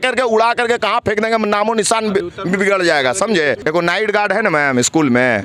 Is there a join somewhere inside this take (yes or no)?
yes